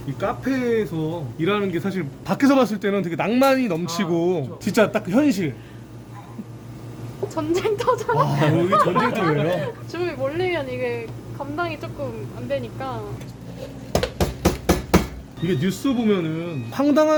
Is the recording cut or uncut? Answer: uncut